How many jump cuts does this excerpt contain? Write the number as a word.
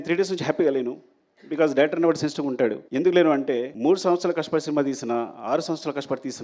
two